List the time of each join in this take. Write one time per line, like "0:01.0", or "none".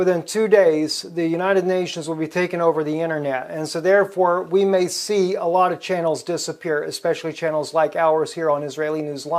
0:08.3